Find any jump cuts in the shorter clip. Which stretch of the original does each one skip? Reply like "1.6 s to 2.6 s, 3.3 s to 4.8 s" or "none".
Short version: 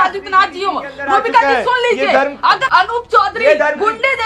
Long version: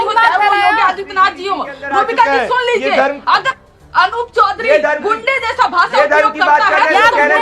3.5 s to 3.9 s